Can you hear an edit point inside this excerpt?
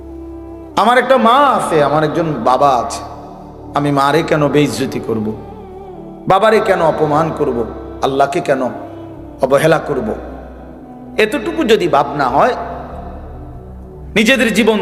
no; 0 cuts

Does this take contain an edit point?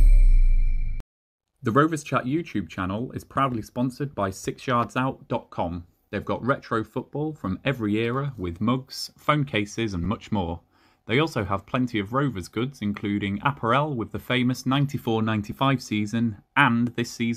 yes; 1 cut; at 1.6 s

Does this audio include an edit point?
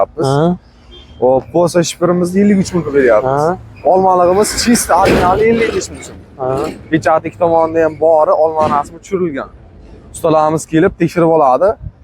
no; 0 cuts

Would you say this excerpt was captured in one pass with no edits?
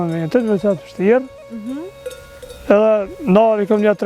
yes; 0 cuts

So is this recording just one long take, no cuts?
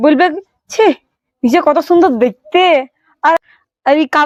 yes; 0 cuts

